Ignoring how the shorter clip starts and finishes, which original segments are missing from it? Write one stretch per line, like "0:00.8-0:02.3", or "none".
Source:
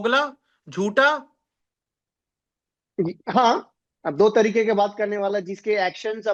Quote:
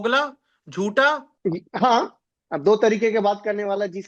0:01.3-0:02.8